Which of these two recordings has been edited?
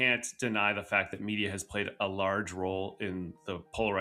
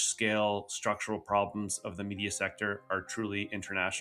second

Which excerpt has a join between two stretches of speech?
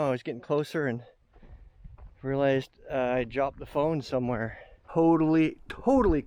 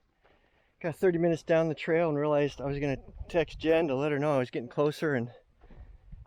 first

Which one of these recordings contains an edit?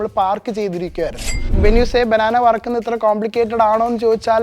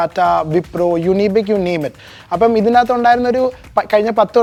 first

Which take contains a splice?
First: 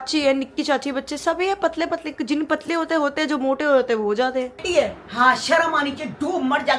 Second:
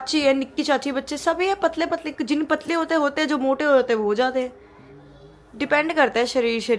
first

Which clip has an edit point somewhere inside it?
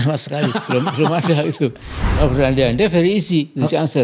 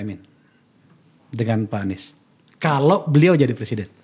first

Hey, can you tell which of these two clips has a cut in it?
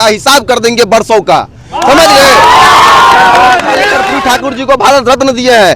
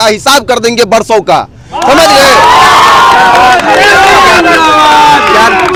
first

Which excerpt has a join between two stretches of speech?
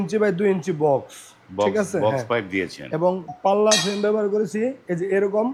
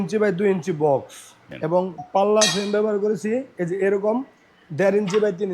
second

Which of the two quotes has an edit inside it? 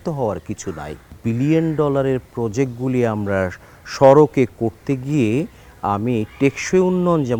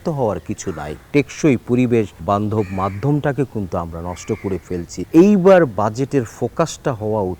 second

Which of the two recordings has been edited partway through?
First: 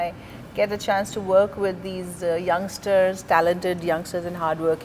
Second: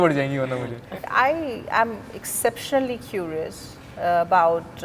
second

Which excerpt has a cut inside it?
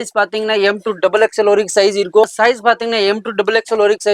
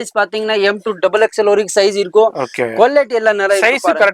first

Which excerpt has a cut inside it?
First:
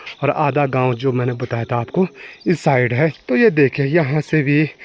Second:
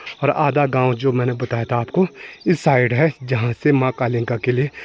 first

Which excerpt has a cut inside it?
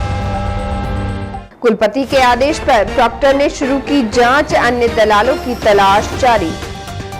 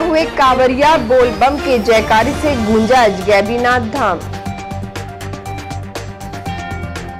first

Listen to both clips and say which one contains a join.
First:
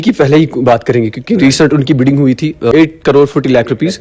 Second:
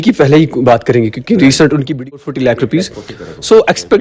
second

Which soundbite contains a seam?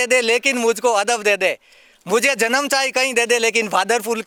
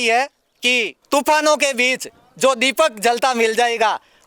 second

